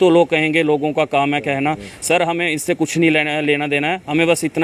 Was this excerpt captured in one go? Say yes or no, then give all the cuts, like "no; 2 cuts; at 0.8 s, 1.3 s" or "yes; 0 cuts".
yes; 0 cuts